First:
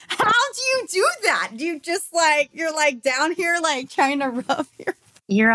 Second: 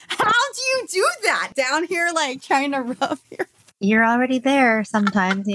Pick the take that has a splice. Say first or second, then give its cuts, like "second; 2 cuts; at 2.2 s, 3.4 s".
second; 1 cut; at 1.5 s